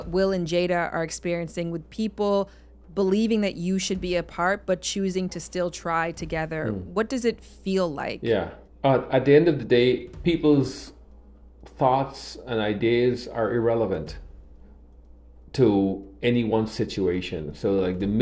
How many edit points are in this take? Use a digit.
1